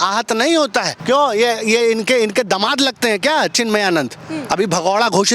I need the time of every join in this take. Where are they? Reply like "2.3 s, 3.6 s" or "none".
none

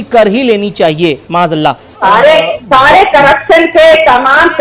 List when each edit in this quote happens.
2.0 s

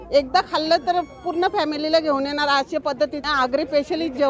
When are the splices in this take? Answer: 3.2 s

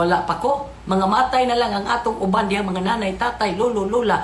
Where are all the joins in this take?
none

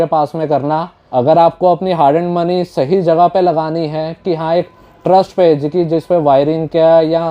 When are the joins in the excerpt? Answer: 1.0 s

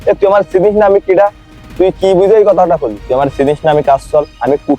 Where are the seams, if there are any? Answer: 3.0 s

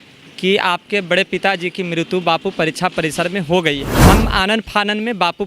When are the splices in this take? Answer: 3.9 s

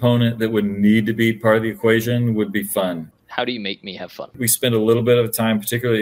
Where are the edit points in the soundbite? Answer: 3.1 s, 4.5 s

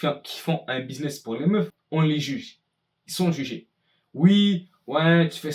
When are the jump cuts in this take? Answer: 1.8 s

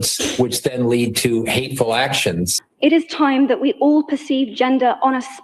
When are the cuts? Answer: 2.6 s

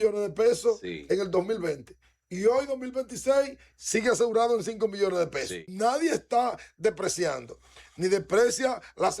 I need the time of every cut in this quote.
5.7 s

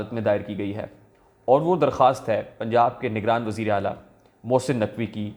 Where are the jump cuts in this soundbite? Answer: none

